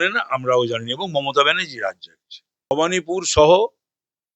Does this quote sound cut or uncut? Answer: cut